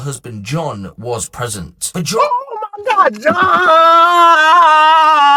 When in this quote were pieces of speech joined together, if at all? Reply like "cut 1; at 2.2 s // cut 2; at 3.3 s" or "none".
none